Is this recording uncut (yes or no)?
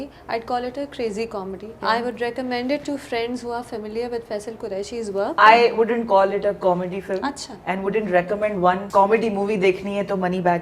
no